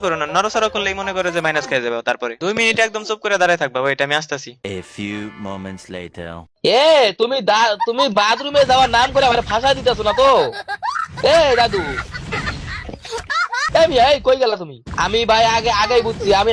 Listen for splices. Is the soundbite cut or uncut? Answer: cut